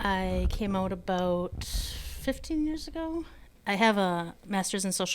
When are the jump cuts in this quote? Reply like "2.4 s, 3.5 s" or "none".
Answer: 3.5 s